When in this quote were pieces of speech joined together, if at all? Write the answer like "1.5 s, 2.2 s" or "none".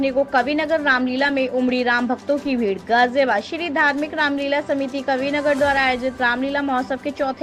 none